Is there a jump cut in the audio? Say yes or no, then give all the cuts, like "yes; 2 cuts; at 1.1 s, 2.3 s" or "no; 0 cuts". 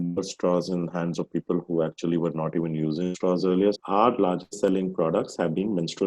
yes; 1 cut; at 3.7 s